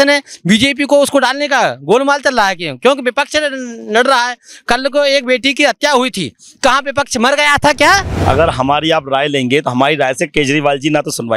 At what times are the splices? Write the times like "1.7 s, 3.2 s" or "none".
8.2 s

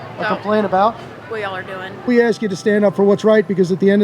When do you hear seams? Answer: 2.1 s

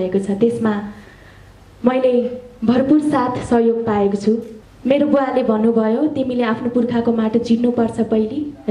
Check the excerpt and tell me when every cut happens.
4.5 s

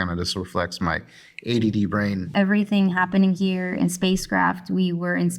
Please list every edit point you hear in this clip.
2.2 s

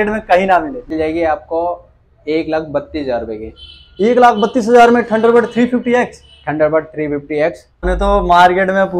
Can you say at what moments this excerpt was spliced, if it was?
0.9 s, 7.8 s

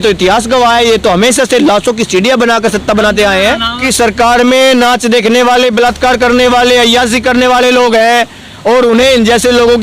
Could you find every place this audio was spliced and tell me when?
3.8 s

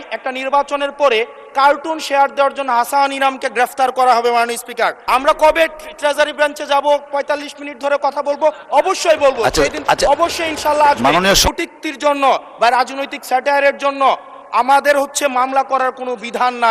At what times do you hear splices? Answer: 5.0 s, 11.4 s

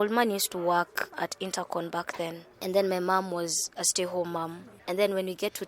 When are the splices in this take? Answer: 1.1 s, 4.7 s

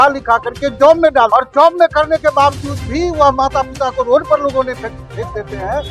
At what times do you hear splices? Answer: 1.3 s

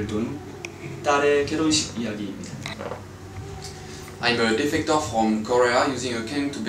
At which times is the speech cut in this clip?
3.1 s

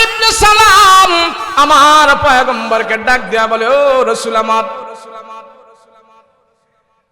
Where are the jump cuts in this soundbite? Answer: 1.4 s

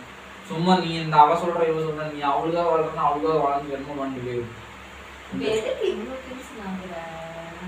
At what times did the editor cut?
6.2 s

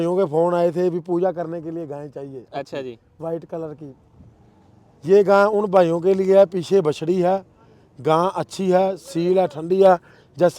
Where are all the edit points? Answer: none

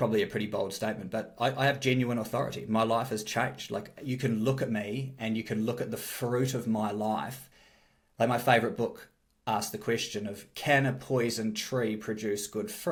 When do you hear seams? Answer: none

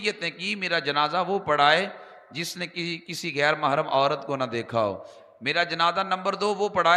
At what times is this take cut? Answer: none

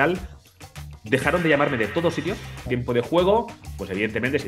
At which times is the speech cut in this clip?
2.6 s

